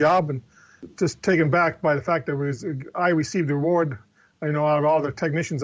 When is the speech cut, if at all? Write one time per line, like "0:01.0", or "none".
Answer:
none